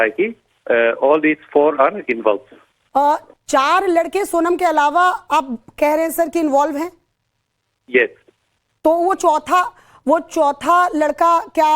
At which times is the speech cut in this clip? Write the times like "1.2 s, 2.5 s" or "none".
9.2 s